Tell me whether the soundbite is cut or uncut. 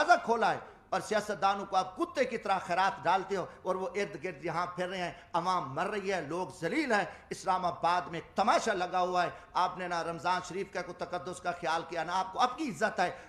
uncut